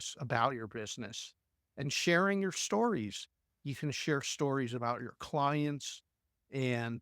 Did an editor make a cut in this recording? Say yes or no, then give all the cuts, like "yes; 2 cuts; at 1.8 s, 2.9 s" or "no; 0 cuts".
yes; 1 cut; at 3.4 s